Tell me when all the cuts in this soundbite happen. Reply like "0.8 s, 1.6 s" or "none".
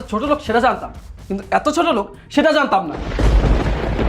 3.0 s